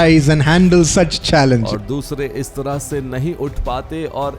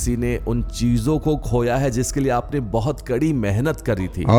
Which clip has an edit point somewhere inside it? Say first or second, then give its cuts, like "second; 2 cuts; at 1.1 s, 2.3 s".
first; 1 cut; at 1.7 s